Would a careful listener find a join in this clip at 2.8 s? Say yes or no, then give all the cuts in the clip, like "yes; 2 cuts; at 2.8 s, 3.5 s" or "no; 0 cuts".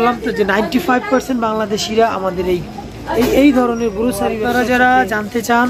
no; 1 cut; at 4.4 s